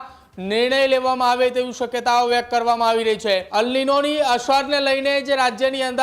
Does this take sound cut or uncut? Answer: cut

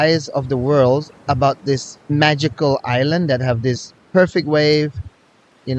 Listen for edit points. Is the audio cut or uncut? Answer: cut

